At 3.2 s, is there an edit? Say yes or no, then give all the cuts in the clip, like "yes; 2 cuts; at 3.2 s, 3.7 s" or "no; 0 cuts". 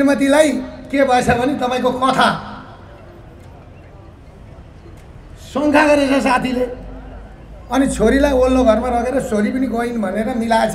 no; 0 cuts